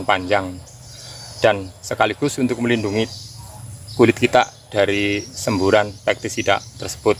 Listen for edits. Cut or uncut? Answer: uncut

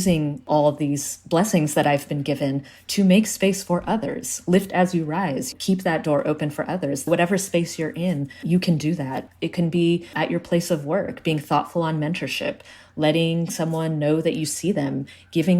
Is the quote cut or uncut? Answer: uncut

